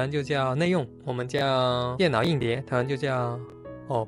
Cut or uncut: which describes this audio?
cut